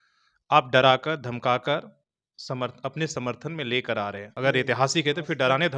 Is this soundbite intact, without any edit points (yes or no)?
no